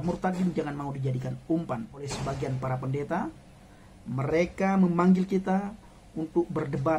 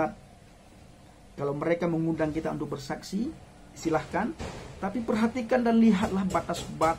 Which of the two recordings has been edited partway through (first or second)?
first